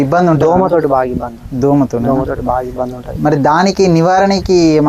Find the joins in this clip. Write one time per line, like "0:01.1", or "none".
none